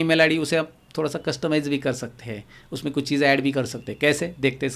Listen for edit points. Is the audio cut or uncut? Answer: uncut